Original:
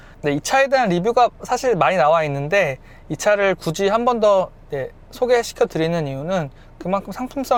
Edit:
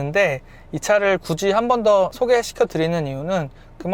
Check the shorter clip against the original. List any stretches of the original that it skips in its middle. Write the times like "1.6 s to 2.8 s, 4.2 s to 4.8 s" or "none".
4.5 s to 5.1 s